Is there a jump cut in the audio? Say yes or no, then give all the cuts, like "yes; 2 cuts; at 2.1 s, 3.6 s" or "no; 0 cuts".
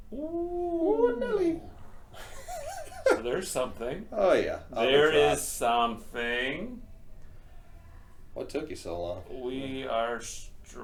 no; 0 cuts